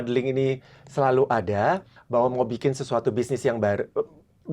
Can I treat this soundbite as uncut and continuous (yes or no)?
no